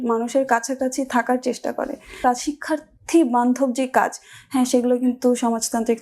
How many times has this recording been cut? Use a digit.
1